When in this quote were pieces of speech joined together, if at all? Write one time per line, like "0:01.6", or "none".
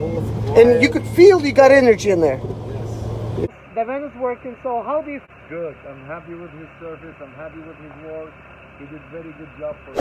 0:03.5
0:05.2